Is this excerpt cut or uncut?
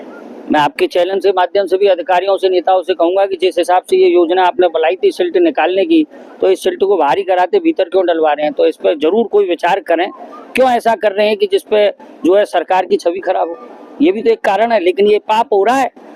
uncut